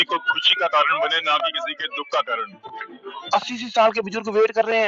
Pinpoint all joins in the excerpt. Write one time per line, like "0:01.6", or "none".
0:03.1